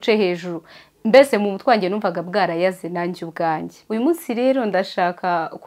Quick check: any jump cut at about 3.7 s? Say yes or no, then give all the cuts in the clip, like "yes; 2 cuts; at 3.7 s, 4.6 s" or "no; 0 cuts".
yes; 1 cut; at 3.7 s